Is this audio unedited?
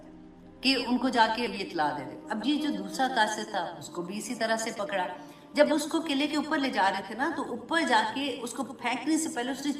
yes; 0 cuts

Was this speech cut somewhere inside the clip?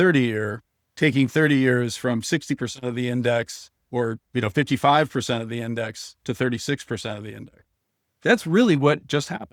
no; 0 cuts

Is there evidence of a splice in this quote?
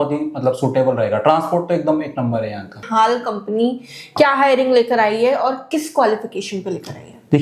no; 0 cuts

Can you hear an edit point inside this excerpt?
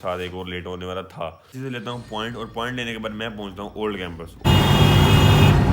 yes; 2 cuts; at 1.5 s, 4.4 s

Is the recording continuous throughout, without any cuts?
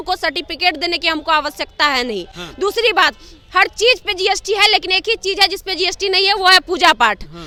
yes; 0 cuts

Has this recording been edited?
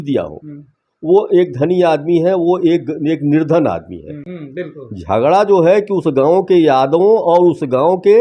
yes; 1 cut; at 4.2 s

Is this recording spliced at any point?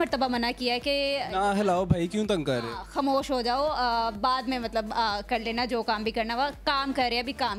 no; 0 cuts

